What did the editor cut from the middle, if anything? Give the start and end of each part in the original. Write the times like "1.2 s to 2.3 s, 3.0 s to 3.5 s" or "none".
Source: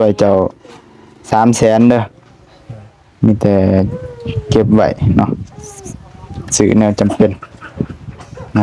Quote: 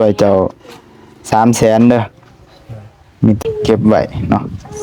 3.4 s to 4.3 s